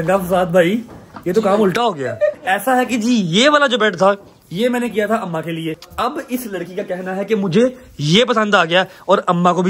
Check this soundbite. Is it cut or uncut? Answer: cut